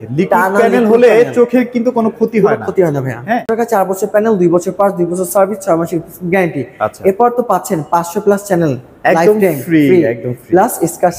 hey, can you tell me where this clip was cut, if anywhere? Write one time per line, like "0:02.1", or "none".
0:03.5